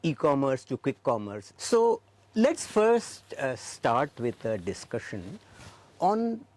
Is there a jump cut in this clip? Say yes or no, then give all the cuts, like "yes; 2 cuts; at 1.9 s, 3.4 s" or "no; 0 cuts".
no; 0 cuts